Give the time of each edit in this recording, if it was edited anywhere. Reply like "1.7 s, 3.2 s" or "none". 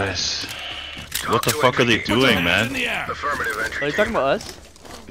none